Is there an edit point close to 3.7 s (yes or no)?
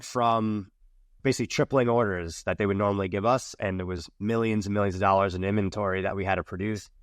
yes